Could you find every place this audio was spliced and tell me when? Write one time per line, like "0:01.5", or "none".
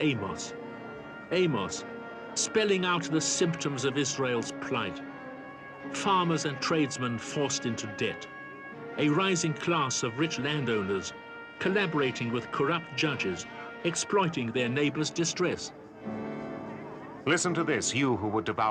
0:05.4

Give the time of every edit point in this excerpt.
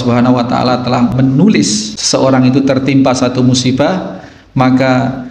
0:01.1
0:01.9

